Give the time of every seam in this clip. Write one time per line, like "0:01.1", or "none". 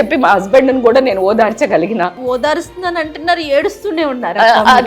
0:02.2